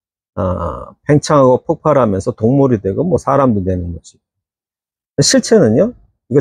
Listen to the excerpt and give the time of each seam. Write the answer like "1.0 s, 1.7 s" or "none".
3.2 s